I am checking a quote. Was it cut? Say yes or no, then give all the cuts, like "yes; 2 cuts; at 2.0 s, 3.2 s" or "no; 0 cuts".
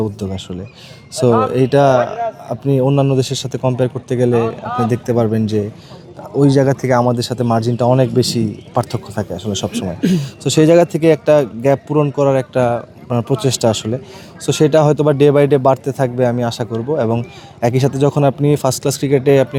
no; 0 cuts